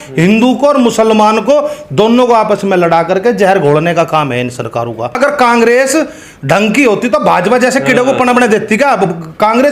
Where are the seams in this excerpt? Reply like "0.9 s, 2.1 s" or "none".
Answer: 5.1 s